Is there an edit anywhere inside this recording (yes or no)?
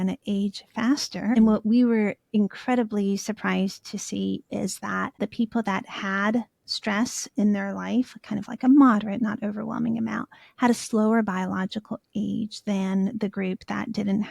yes